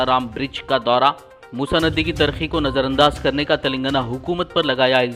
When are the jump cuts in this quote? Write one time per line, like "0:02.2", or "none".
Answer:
none